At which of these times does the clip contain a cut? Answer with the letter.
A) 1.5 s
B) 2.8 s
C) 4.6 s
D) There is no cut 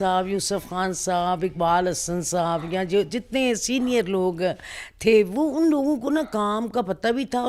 D